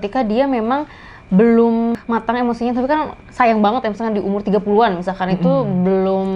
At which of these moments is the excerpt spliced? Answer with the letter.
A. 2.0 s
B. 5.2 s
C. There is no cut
A